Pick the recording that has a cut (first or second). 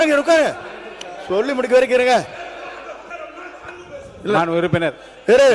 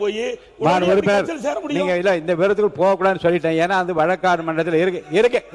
first